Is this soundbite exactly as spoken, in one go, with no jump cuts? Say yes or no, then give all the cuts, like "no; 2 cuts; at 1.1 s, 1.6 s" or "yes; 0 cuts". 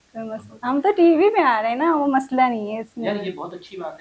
yes; 0 cuts